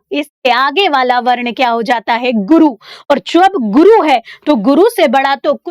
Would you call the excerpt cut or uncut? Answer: uncut